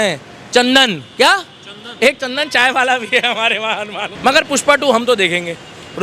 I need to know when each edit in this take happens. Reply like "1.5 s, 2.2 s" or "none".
4.0 s